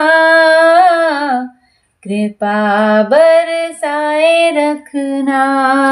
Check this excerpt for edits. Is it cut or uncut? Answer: uncut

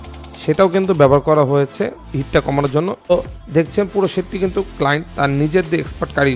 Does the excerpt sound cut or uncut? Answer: cut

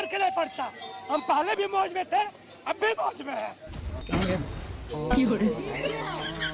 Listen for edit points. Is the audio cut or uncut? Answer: cut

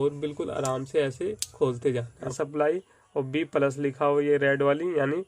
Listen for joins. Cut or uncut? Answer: cut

